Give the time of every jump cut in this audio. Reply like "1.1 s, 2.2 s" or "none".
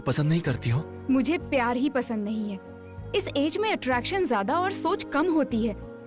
none